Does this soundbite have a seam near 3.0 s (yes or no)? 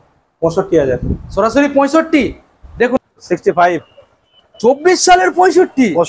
yes